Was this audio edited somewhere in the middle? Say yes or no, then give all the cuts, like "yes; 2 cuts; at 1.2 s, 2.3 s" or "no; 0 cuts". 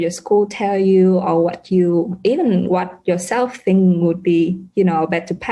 no; 0 cuts